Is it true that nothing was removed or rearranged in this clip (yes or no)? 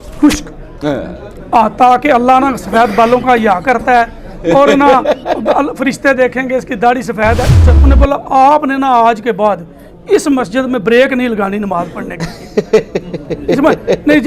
no